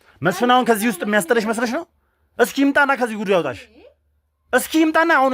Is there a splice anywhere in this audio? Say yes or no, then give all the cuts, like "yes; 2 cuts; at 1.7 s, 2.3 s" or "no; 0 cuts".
no; 0 cuts